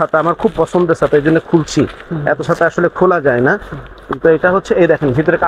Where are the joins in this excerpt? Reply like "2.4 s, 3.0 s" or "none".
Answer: none